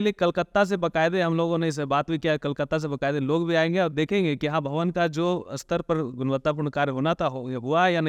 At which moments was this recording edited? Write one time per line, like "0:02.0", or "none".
none